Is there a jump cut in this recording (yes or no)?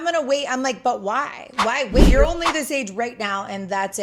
yes